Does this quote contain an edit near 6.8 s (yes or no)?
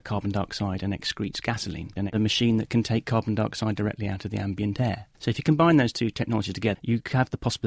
yes